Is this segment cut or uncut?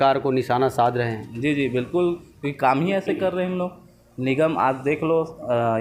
uncut